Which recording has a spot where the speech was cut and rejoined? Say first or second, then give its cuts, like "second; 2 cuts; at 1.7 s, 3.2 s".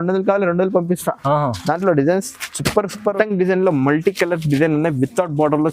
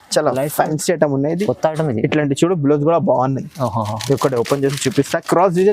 first; 1 cut; at 3.1 s